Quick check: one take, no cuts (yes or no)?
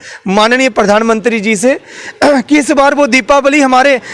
yes